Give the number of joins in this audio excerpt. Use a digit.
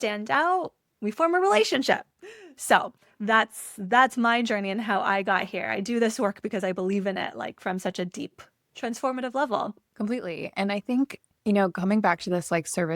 2